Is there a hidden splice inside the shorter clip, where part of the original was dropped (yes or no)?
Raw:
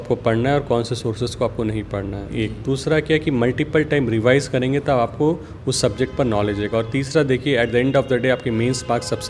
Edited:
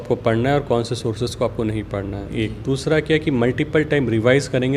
no